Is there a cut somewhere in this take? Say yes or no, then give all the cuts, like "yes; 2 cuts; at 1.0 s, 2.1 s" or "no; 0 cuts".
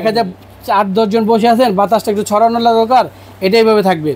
no; 0 cuts